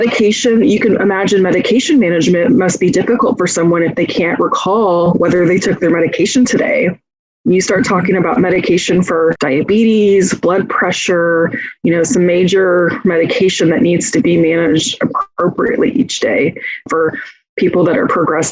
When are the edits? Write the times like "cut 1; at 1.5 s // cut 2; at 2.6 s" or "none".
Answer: cut 1; at 5.1 s // cut 2; at 9.4 s // cut 3; at 16.9 s